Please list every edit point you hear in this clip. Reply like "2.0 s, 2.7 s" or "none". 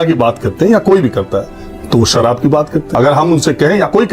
2.9 s